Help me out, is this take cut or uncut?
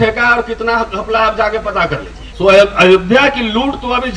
cut